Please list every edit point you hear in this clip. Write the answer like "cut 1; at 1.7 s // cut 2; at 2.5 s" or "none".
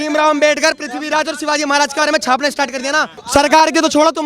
cut 1; at 3.2 s

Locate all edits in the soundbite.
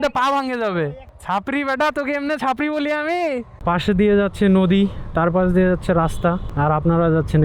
cut 1; at 3.5 s // cut 2; at 6.5 s

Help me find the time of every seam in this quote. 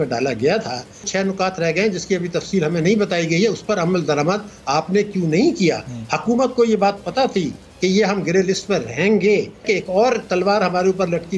cut 1; at 1.1 s // cut 2; at 9.6 s

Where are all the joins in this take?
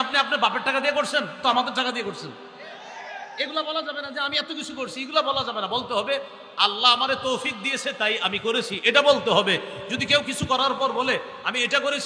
none

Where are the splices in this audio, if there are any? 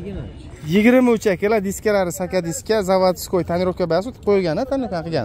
none

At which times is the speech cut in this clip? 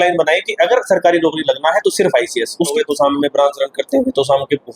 cut 1; at 2.7 s

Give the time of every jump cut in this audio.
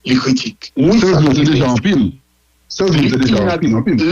cut 1; at 0.9 s

